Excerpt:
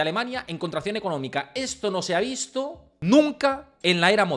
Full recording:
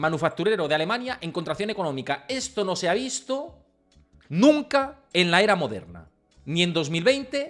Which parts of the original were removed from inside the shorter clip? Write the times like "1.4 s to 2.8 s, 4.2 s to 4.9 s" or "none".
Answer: 3.6 s to 4.1 s